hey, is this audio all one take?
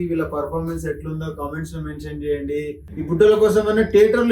no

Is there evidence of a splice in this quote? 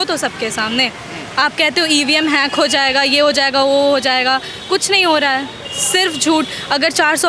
no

